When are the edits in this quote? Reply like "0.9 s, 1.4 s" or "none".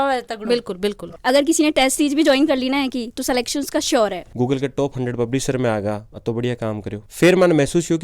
1.1 s, 4.2 s, 7.0 s